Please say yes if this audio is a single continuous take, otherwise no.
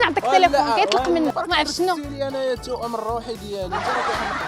no